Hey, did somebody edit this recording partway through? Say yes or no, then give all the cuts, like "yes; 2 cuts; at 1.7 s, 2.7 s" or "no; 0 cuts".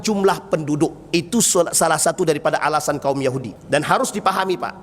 yes; 1 cut; at 3.5 s